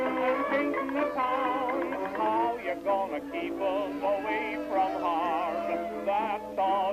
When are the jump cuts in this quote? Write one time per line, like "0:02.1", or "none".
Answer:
0:04.7